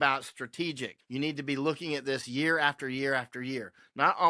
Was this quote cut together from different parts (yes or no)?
yes